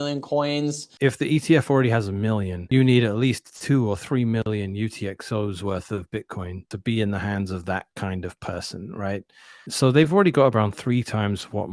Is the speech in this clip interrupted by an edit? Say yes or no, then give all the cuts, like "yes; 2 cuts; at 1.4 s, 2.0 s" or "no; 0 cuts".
yes; 4 cuts; at 0.8 s, 2.5 s, 6.7 s, 9.7 s